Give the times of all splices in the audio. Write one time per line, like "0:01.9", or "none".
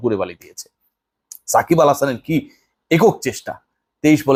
none